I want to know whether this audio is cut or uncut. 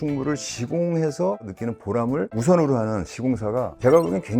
uncut